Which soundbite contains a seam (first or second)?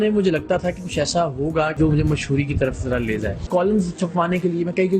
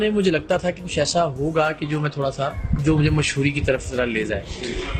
first